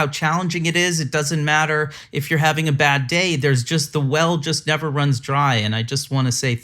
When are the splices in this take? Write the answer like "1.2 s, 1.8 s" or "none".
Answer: none